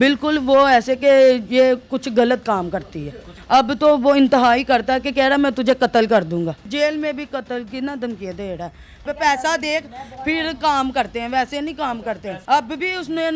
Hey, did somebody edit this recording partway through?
yes; 4 cuts; at 3.3 s, 6.7 s, 9.0 s, 12.4 s

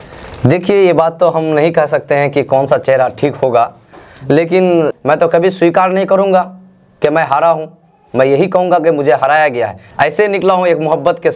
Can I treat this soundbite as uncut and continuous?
no; 2 cuts; at 4.9 s, 9.8 s

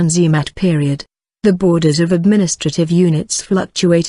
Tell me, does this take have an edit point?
no; 0 cuts

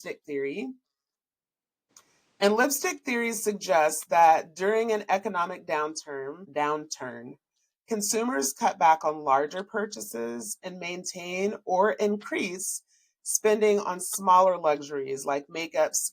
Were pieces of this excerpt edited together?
yes; 1 cut; at 6.5 s

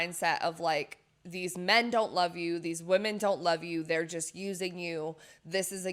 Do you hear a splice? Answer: no; 0 cuts

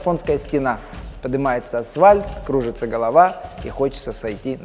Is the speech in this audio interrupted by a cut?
no; 0 cuts

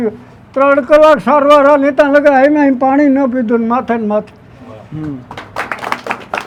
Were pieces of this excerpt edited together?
no; 0 cuts

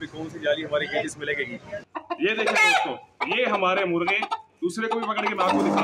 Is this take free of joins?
no; 1 cut; at 1.8 s

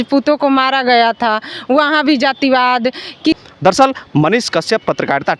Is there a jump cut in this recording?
yes; 1 cut; at 3.4 s

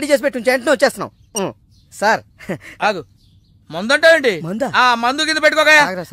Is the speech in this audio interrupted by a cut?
no; 0 cuts

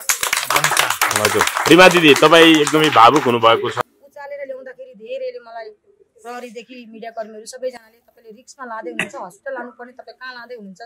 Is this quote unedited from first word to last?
no; 1 cut; at 3.8 s

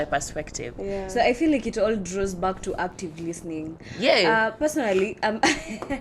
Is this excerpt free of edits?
yes; 0 cuts

